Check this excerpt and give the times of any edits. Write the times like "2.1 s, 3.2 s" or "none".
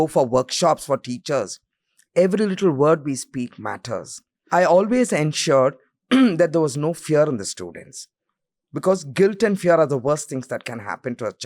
4.3 s